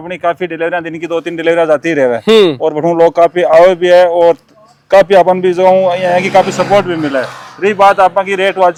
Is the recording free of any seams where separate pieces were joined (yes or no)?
yes